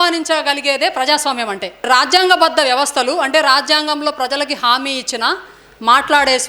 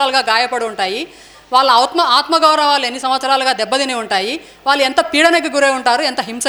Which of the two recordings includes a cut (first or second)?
first